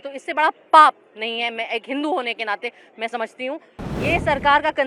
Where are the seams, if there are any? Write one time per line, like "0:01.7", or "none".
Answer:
0:03.8